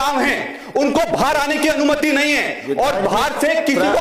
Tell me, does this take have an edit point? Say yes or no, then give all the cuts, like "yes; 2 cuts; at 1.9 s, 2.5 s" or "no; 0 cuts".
no; 0 cuts